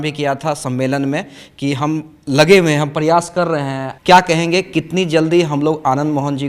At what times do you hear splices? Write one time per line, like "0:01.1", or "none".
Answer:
0:03.8